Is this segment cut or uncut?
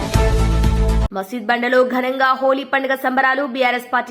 cut